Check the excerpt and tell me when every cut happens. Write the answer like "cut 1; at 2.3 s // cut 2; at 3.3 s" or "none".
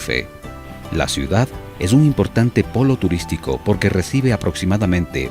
cut 1; at 1.6 s